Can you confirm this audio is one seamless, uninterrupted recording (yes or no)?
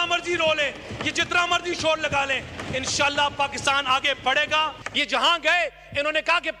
no